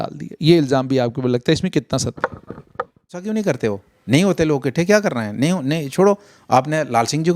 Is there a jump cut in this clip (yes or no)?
yes